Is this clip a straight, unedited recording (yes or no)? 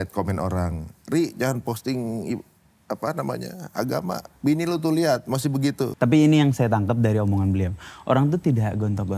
no